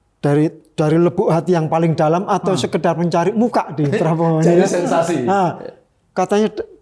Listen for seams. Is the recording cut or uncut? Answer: uncut